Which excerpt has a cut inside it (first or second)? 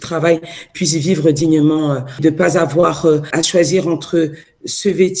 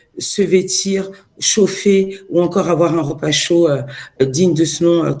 first